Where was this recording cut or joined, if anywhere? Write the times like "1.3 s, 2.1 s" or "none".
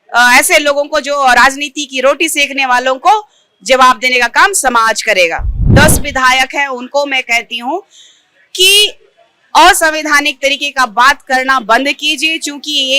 5.6 s